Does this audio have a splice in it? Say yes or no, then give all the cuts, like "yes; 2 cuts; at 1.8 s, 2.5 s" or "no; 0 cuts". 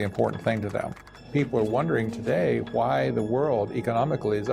yes; 1 cut; at 1.1 s